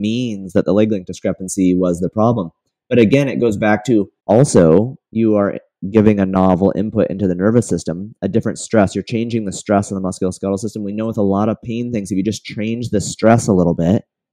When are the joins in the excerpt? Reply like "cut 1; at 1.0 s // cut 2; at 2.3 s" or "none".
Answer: cut 1; at 4.1 s